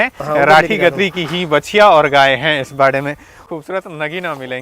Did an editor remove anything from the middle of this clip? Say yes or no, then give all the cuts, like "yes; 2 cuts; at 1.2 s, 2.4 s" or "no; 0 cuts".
yes; 1 cut; at 3.4 s